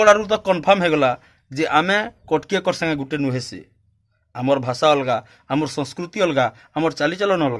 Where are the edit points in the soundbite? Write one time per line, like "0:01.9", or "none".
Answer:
none